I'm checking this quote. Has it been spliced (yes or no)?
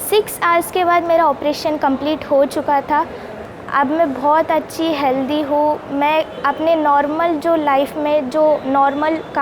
yes